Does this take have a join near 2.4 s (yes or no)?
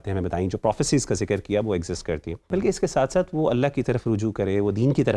yes